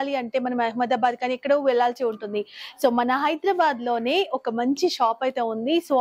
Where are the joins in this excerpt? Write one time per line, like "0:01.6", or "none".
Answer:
none